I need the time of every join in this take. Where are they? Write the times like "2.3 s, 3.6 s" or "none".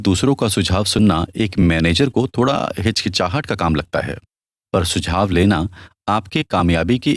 none